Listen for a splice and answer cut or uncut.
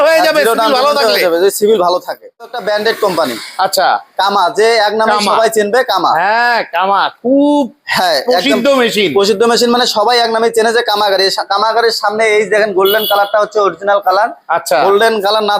cut